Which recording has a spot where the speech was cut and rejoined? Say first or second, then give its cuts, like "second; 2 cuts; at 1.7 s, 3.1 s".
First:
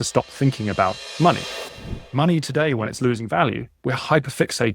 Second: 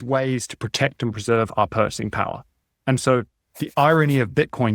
second; 1 cut; at 3.5 s